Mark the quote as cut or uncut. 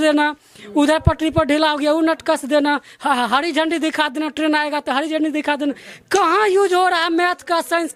uncut